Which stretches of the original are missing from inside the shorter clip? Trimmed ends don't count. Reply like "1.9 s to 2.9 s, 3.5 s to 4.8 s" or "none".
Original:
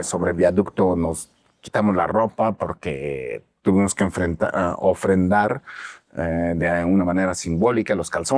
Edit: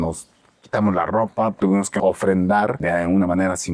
2.9 s to 4.7 s, 5.6 s to 6.6 s